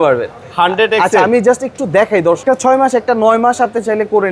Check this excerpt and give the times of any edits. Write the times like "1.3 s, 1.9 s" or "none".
2.4 s